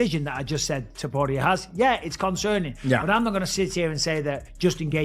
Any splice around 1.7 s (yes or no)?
no